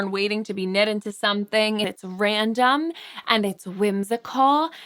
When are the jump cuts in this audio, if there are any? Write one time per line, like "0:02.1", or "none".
0:01.9